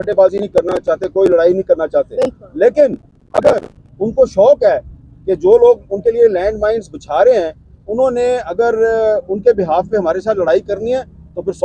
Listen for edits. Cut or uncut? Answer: uncut